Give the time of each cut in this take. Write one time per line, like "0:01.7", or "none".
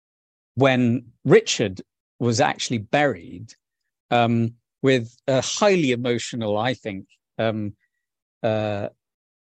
none